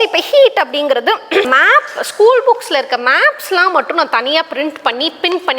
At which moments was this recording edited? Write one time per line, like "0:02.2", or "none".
0:01.4